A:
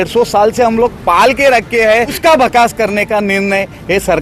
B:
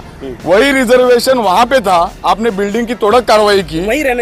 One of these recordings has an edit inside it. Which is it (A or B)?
A